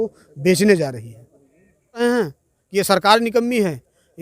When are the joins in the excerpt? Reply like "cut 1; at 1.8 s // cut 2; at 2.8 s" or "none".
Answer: cut 1; at 2.0 s

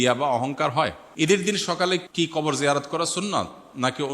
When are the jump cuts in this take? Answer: cut 1; at 1.0 s // cut 2; at 2.1 s

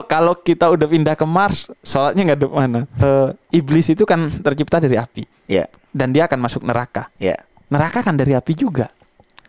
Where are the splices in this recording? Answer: cut 1; at 3.0 s

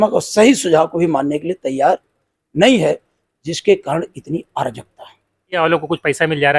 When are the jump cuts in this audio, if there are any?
cut 1; at 5.6 s

